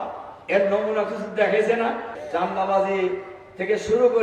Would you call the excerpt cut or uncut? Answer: cut